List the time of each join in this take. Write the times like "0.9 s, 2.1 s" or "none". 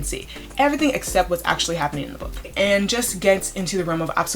2.5 s

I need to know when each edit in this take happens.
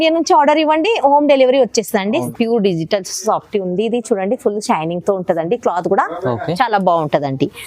2.3 s

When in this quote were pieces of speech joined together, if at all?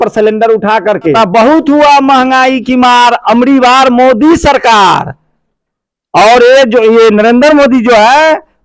1.1 s

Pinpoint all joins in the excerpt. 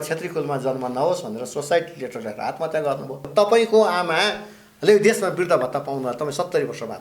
3.3 s

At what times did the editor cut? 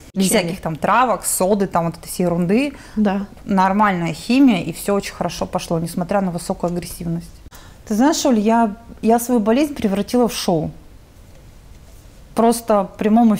7.4 s

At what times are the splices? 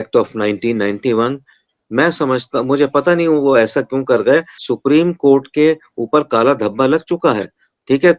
4.5 s

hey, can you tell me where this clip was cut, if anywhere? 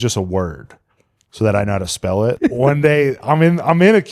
2.4 s

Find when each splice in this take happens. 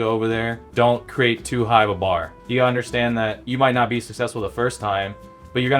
0.9 s, 2.4 s, 3.4 s

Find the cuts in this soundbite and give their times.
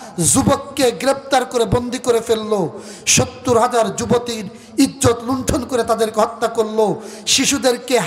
none

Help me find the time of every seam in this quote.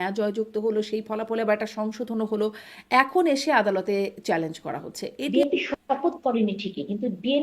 5.3 s

